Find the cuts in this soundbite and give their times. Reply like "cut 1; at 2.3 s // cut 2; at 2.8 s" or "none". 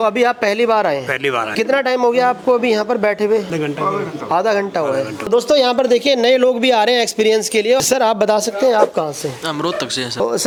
none